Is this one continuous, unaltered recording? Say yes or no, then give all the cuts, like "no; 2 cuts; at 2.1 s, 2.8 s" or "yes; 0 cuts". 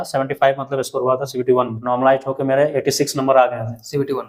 no; 1 cut; at 1.8 s